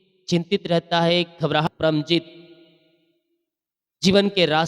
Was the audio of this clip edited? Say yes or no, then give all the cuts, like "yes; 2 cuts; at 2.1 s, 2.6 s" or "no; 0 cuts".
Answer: yes; 1 cut; at 1.6 s